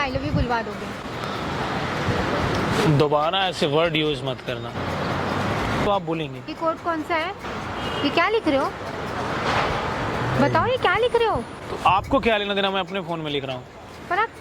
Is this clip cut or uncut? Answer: cut